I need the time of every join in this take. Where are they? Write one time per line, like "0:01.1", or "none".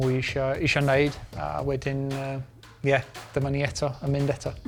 none